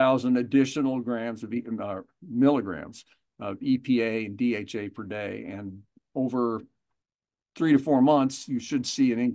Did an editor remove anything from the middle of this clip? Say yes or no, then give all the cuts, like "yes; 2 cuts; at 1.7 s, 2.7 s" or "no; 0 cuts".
no; 0 cuts